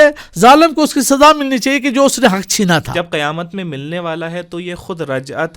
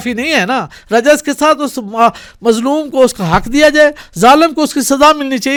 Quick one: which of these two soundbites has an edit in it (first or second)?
first